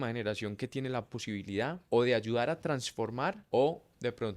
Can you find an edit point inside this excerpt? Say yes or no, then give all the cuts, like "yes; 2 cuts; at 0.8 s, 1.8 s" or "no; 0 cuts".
yes; 2 cuts; at 1.8 s, 3.4 s